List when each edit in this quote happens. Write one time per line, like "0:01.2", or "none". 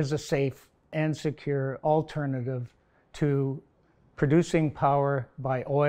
0:00.9